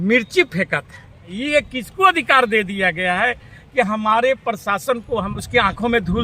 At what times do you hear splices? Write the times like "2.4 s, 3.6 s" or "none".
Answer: 1.4 s, 5.3 s